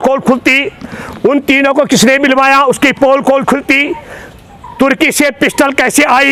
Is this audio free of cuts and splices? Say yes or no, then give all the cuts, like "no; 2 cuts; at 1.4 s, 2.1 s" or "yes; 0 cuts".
yes; 0 cuts